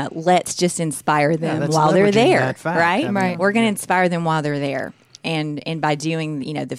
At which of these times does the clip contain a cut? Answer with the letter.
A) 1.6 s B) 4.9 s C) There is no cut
C